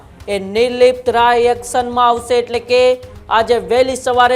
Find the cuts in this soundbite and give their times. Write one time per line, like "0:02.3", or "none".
none